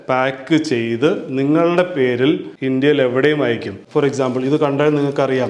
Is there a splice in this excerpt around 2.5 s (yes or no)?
yes